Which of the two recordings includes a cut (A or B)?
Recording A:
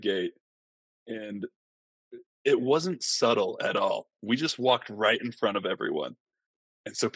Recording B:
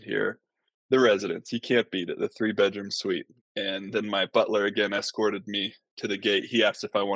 B